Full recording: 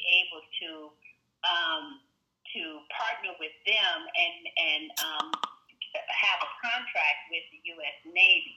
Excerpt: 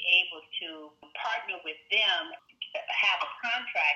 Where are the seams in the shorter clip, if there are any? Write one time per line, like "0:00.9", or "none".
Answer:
0:01.1
0:02.3